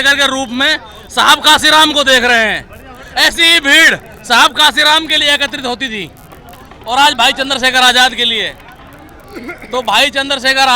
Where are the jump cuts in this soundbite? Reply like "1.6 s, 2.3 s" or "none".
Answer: none